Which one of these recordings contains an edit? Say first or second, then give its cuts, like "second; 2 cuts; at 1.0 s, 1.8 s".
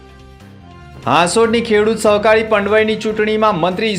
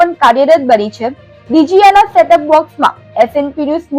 first; 1 cut; at 0.9 s